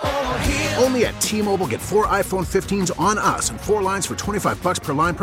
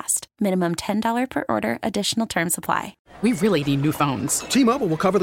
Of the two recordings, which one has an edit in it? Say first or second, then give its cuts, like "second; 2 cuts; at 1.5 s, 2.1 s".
second; 1 cut; at 3.0 s